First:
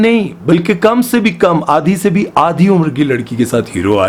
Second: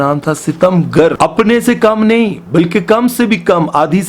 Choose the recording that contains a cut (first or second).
second